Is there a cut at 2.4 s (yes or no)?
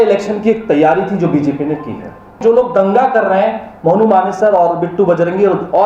yes